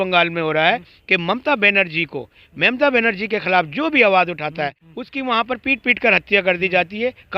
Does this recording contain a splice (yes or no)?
yes